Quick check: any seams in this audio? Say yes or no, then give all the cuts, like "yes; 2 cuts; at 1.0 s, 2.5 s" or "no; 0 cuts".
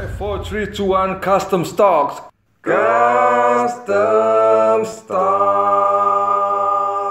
no; 0 cuts